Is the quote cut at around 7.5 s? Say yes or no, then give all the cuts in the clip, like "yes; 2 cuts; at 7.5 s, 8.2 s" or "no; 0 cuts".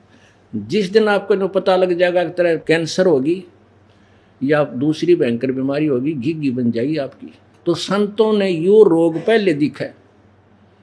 yes; 1 cut; at 7.5 s